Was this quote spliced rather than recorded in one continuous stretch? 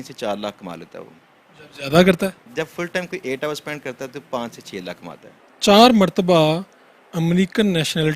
yes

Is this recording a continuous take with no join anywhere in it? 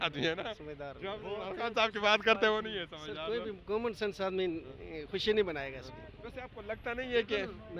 yes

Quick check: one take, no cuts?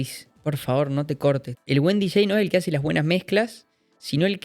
no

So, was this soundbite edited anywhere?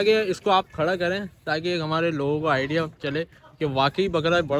no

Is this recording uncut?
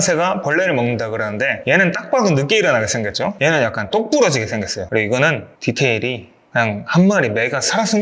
no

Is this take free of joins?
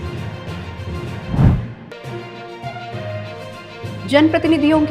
yes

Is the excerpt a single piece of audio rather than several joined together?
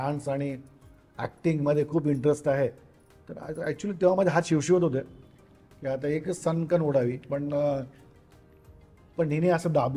yes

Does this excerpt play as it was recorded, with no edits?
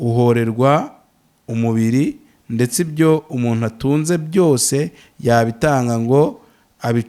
yes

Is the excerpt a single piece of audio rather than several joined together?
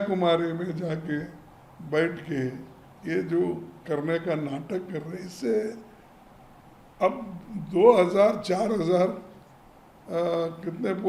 yes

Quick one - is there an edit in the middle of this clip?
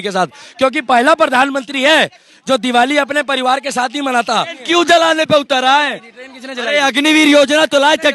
yes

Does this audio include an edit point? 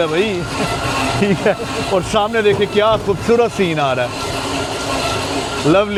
no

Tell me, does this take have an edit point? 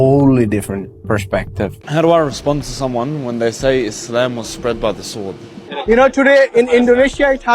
yes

